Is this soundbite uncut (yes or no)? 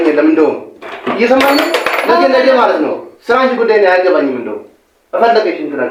yes